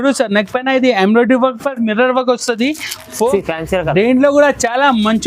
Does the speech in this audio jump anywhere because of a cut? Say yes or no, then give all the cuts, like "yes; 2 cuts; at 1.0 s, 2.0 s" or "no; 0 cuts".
yes; 1 cut; at 3.3 s